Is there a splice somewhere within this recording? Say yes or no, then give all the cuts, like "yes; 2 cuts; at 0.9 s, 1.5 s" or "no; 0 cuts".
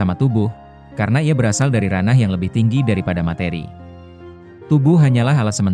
no; 0 cuts